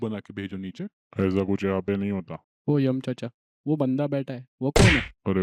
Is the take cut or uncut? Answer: uncut